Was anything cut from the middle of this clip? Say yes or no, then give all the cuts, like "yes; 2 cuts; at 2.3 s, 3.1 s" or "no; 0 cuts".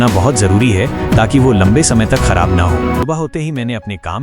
yes; 1 cut; at 3.1 s